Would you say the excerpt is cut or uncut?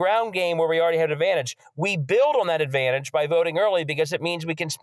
uncut